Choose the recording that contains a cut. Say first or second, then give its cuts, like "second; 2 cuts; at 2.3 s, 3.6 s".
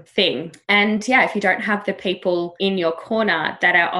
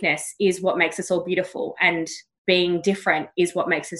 first; 1 cut; at 2.5 s